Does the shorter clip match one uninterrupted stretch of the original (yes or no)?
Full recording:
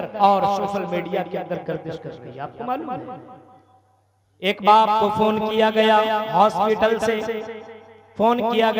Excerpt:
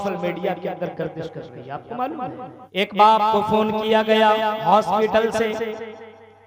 no